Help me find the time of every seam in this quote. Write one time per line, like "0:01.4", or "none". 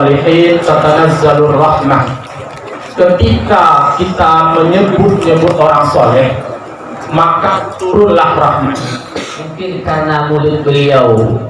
0:09.6